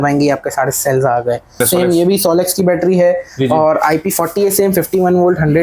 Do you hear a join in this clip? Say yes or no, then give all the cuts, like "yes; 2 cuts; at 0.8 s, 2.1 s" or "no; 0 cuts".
yes; 1 cut; at 1.6 s